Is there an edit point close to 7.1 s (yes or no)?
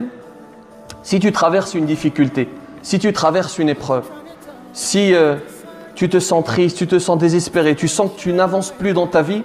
no